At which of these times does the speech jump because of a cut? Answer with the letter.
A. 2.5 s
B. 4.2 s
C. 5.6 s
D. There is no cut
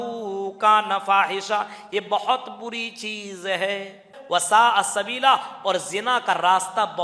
B